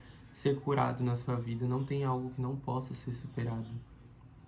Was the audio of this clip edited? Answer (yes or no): no